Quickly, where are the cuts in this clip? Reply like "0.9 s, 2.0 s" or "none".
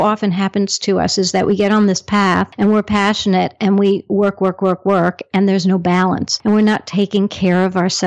2.5 s, 6.3 s